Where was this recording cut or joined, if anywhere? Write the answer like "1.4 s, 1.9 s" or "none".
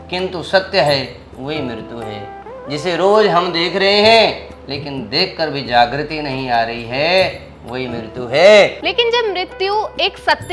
8.8 s